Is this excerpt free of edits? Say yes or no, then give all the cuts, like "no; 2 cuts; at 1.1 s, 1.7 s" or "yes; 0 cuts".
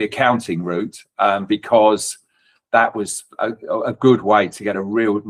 yes; 0 cuts